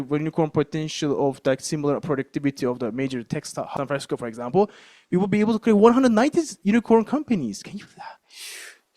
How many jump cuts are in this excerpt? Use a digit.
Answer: 1